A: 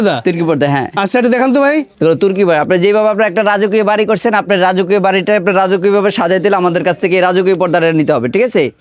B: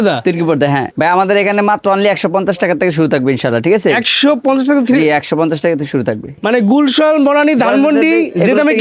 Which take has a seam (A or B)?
B